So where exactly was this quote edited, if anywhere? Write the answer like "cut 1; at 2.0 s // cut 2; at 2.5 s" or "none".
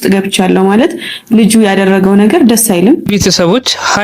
none